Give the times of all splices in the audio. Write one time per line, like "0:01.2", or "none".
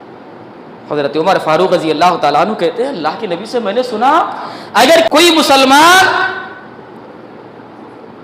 0:05.1